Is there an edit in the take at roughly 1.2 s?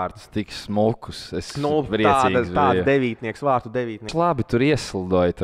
no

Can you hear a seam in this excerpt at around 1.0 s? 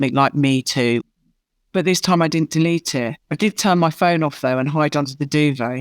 yes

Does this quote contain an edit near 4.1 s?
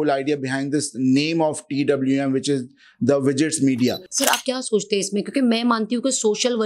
yes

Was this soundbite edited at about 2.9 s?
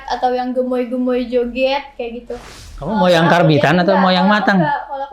yes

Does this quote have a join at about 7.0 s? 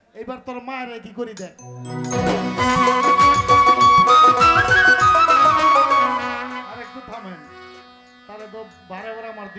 no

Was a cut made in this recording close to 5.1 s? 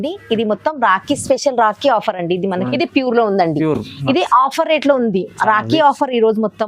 no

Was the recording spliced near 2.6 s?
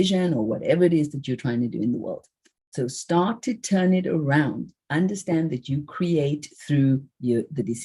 no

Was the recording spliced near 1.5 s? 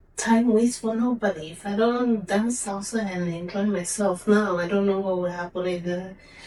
no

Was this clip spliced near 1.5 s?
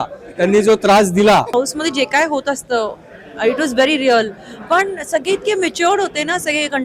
yes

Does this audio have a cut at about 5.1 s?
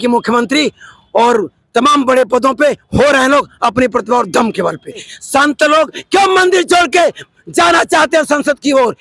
yes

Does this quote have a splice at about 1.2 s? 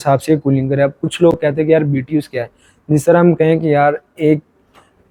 no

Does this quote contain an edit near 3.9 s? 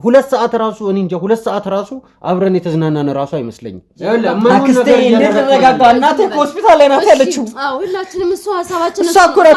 yes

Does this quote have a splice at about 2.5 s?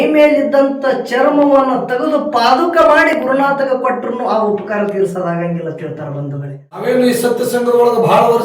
no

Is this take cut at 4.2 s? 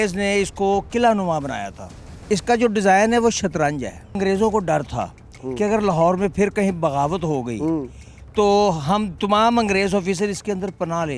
yes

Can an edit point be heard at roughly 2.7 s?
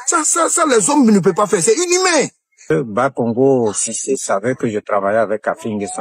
yes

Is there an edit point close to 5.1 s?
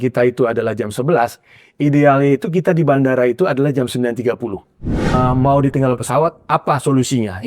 yes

